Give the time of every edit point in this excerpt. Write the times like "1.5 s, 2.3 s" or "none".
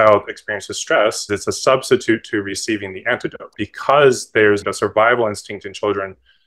1.2 s, 3.5 s, 4.7 s